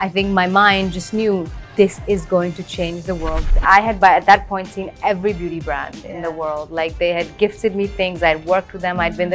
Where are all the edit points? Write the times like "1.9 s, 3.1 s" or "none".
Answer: 3.5 s